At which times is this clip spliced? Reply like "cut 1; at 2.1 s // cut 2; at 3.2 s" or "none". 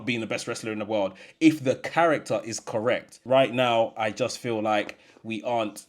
cut 1; at 3.2 s